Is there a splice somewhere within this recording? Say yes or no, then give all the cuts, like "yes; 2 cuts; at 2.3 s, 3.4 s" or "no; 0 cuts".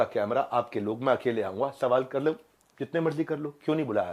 no; 0 cuts